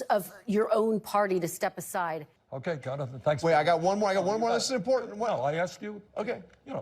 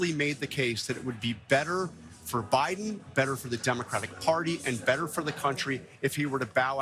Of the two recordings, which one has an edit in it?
first; 1 cut; at 2.4 s

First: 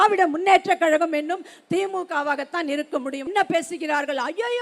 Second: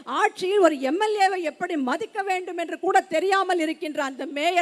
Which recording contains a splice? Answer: first; 1 cut; at 3.3 s

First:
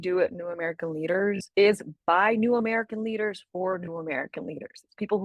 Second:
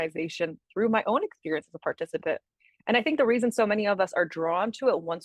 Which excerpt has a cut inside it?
first; 1 cut; at 1.4 s

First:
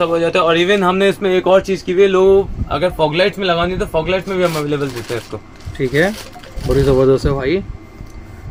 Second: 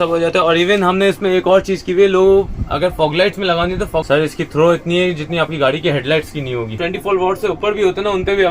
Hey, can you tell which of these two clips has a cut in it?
second; 2 cuts; at 4.0 s, 6.7 s

